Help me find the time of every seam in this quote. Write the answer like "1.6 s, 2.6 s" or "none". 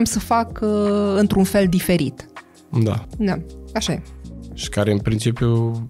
none